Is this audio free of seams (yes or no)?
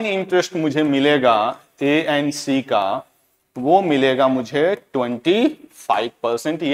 yes